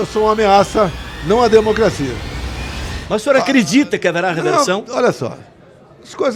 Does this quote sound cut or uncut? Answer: uncut